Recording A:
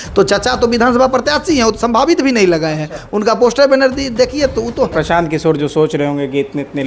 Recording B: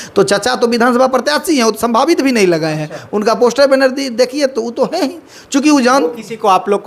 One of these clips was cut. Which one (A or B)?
A